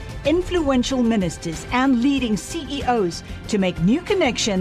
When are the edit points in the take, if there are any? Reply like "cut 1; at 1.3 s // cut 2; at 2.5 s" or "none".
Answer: none